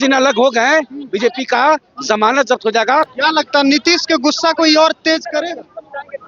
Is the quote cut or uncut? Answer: cut